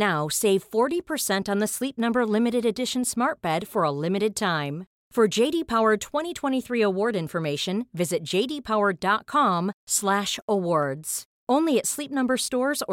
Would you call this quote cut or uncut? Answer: uncut